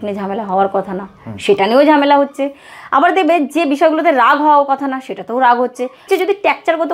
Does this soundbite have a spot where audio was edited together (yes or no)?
yes